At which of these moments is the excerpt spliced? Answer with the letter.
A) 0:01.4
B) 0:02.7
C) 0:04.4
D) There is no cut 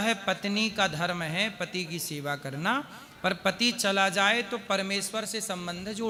D